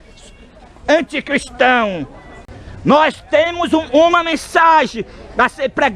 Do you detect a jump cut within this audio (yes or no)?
yes